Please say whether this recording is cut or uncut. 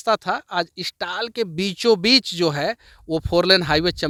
uncut